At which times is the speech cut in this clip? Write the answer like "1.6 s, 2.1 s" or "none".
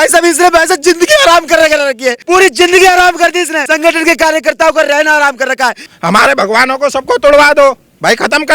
2.1 s, 3.6 s, 5.9 s